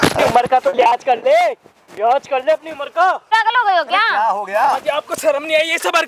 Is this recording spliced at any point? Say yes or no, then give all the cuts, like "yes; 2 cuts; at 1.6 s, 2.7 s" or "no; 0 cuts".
yes; 1 cut; at 3.3 s